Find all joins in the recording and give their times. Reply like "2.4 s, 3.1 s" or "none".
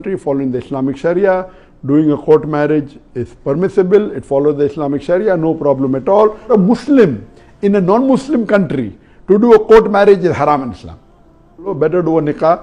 6.5 s, 11.7 s